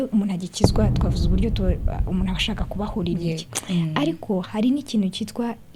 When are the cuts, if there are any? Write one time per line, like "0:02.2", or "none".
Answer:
none